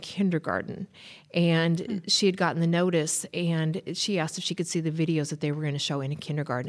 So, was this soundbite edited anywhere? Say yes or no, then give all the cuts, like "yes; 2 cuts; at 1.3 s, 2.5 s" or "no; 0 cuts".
no; 0 cuts